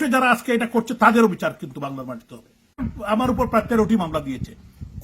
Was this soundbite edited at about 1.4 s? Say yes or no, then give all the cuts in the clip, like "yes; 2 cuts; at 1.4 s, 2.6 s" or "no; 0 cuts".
no; 1 cut; at 2.9 s